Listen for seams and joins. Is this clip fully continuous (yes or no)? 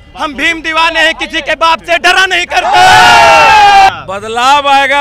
no